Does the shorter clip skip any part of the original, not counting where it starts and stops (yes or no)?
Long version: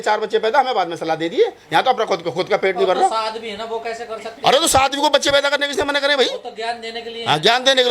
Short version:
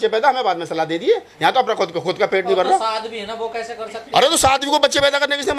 no